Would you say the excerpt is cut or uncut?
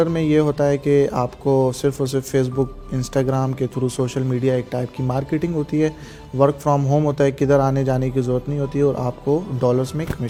uncut